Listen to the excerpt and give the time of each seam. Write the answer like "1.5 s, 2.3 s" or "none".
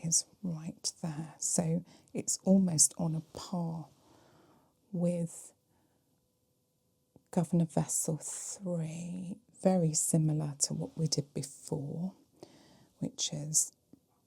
9.5 s